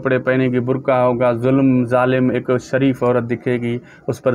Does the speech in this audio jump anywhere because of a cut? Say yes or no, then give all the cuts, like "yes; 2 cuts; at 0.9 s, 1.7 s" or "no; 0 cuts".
no; 0 cuts